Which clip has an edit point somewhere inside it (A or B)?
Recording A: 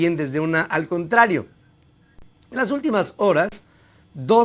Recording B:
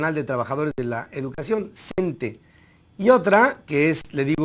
A